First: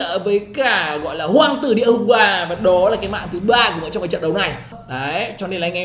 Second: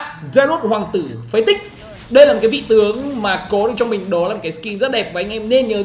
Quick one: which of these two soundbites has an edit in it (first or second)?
first